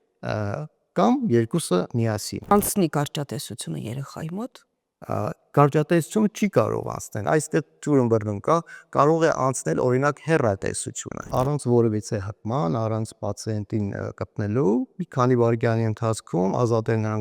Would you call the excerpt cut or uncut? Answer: cut